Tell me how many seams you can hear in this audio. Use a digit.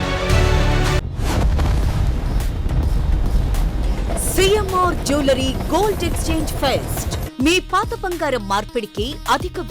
1